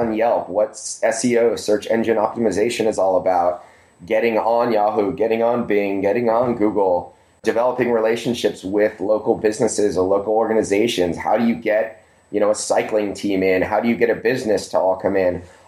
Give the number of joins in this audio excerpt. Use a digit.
1